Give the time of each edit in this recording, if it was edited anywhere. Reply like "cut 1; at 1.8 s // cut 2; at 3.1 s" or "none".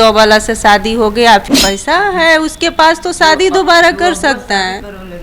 cut 1; at 1.5 s